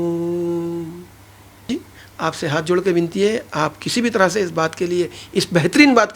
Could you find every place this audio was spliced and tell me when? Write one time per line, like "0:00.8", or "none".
0:01.7